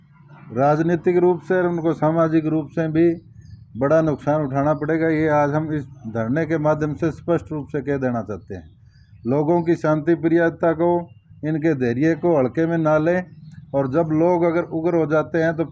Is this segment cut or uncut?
uncut